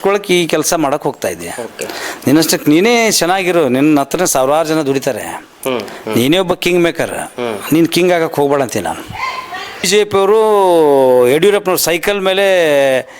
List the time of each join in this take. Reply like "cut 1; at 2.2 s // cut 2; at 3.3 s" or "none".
cut 1; at 9.9 s